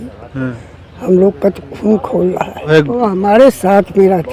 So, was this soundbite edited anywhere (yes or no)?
yes